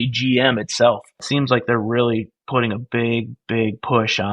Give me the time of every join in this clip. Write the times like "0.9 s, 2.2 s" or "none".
1.2 s

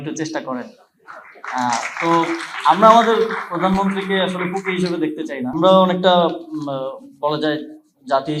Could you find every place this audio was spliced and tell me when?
5.6 s

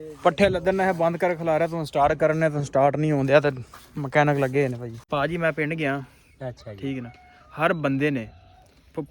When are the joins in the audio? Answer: 4.9 s

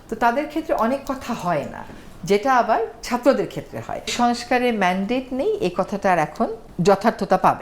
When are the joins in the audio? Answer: 4.1 s, 6.7 s

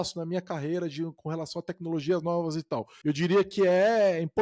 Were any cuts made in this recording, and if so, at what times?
2.9 s

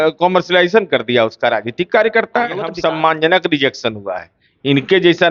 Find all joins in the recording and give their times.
2.7 s

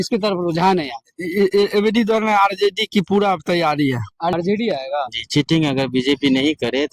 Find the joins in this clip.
4.3 s

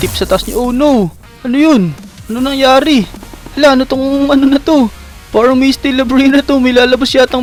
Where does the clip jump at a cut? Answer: none

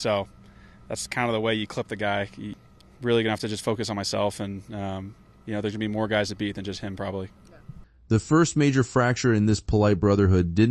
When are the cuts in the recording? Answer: none

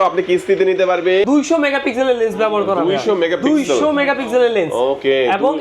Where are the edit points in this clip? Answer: 1.2 s

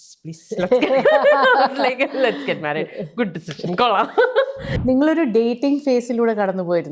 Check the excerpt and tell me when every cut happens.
4.7 s

